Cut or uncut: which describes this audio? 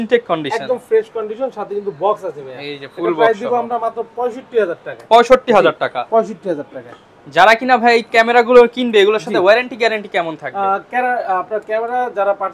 uncut